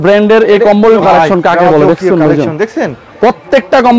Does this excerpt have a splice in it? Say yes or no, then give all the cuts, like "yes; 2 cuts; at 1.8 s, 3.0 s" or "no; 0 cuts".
yes; 1 cut; at 1.0 s